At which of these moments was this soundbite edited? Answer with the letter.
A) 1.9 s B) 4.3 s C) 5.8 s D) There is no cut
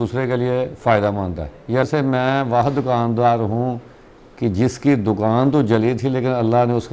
A